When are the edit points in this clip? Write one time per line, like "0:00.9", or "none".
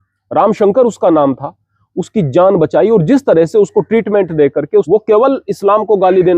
0:04.9